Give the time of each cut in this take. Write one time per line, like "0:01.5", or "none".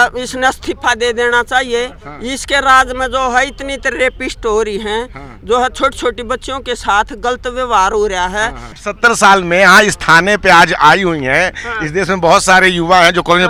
none